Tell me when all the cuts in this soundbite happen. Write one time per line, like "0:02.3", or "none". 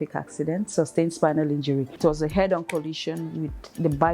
0:01.9